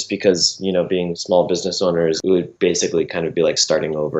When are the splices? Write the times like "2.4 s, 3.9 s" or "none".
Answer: 1.2 s, 2.2 s